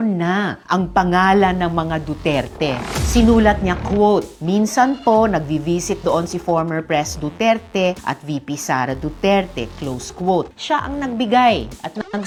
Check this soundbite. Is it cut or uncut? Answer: uncut